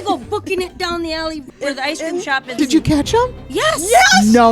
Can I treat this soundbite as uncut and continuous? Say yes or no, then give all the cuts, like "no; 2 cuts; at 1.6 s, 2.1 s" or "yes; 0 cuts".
no; 2 cuts; at 1.5 s, 2.6 s